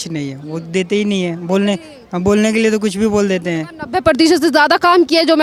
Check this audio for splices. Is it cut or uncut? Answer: uncut